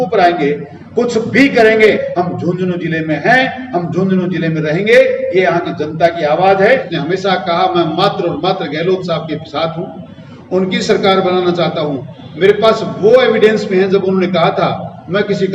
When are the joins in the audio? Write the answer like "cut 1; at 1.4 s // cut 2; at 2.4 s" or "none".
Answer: cut 1; at 2.0 s // cut 2; at 6.7 s